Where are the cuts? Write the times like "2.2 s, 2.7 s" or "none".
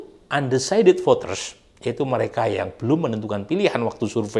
none